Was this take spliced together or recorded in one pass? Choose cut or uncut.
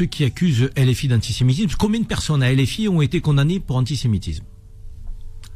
uncut